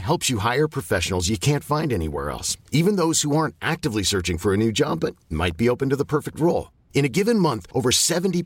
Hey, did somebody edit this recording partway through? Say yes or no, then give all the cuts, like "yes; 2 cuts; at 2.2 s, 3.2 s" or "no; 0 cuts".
no; 0 cuts